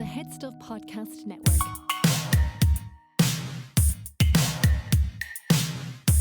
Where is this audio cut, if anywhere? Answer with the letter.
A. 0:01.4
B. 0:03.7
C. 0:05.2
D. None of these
A